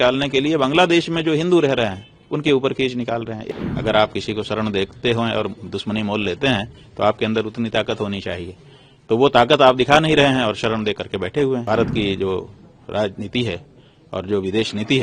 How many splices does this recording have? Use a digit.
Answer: 2